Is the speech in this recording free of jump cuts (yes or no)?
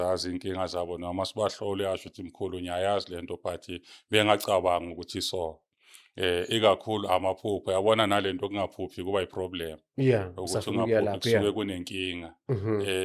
yes